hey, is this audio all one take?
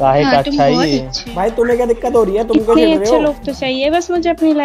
no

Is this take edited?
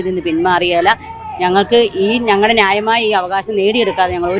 no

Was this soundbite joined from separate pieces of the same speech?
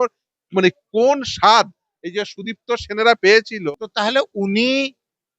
yes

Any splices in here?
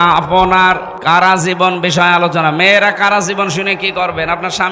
yes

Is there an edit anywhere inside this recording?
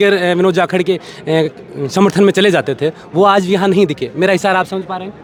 no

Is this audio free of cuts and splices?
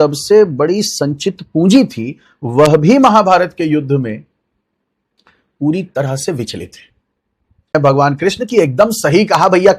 no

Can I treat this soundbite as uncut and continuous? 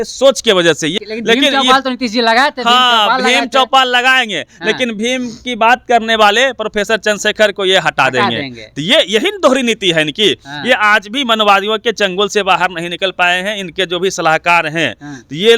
no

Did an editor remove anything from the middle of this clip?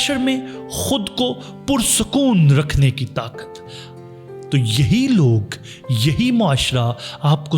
yes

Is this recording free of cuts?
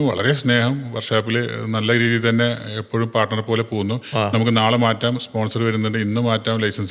yes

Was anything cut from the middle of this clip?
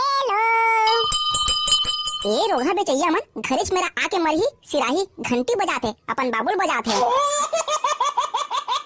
yes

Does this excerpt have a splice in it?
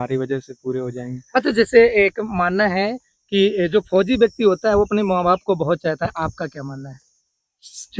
no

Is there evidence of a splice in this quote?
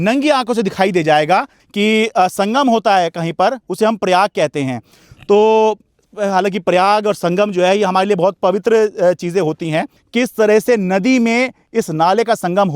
yes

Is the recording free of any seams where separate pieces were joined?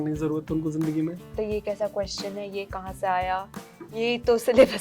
no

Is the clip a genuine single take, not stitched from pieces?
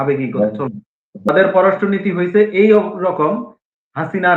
no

